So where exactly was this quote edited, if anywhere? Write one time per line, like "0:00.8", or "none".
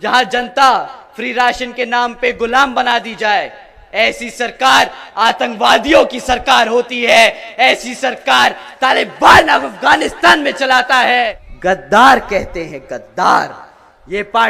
0:11.4